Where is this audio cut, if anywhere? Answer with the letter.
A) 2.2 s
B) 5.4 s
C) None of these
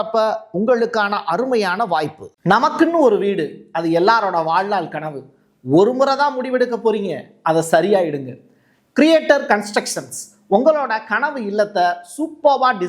A